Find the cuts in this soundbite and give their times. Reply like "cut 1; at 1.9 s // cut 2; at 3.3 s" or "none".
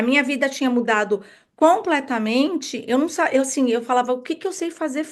none

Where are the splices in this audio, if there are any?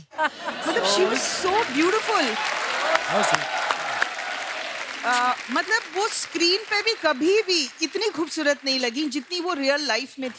none

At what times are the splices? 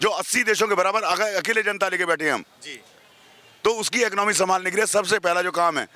none

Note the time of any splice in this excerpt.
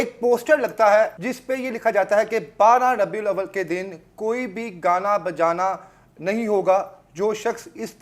cut 1; at 1.3 s

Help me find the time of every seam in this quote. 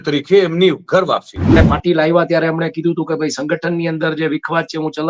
cut 1; at 1.6 s

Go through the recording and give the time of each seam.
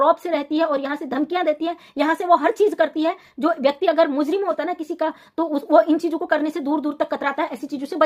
none

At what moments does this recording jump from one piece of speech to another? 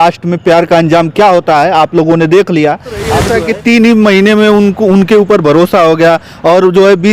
cut 1; at 3.2 s

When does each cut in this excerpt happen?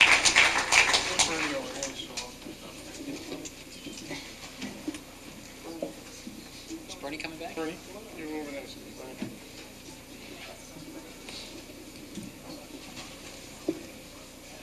cut 1; at 12.9 s

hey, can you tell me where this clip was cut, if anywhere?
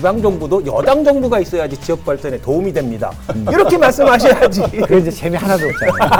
none

